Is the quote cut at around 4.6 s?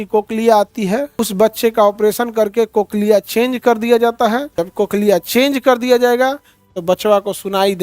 yes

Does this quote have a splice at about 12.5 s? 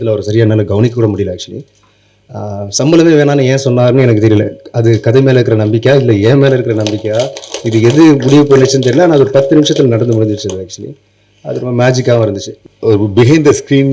yes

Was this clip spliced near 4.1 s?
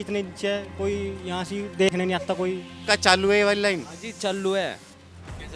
no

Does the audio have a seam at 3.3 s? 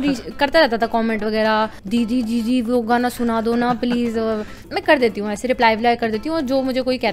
no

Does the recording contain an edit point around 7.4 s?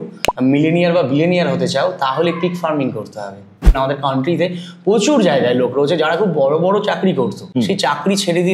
yes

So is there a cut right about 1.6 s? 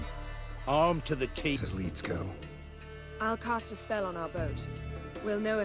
yes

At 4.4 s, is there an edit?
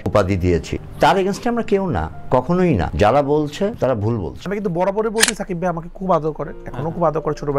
yes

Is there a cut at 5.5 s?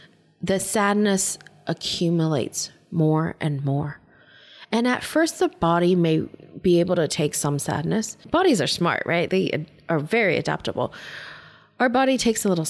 no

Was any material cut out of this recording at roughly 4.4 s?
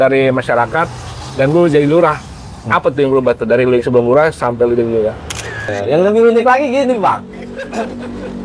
no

